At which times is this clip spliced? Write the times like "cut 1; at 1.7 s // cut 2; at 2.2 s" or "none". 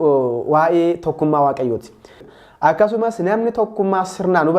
cut 1; at 2.2 s